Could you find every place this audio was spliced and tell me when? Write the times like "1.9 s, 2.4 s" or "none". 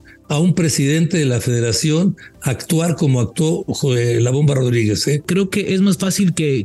5.2 s